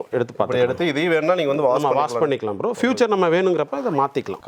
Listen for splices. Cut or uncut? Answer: uncut